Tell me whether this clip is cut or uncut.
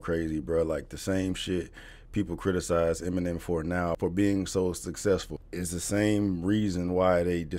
cut